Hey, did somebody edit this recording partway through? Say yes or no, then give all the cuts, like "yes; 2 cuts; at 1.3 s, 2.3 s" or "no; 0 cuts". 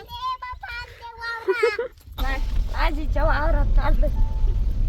yes; 1 cut; at 2.2 s